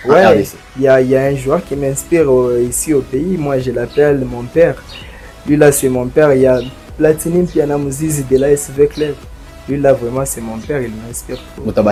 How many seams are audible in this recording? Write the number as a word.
zero